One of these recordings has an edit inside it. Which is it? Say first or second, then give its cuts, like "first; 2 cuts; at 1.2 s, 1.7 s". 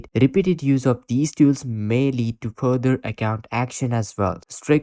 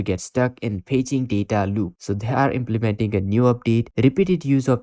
second; 1 cut; at 1.9 s